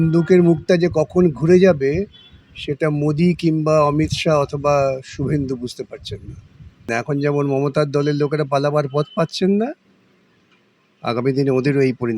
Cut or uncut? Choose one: cut